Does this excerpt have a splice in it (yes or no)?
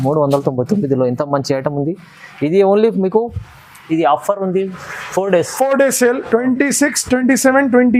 no